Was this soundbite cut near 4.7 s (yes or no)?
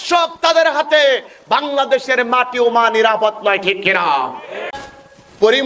yes